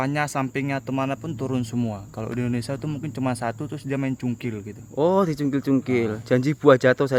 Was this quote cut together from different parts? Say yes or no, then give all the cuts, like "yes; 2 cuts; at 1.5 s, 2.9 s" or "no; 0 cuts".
no; 0 cuts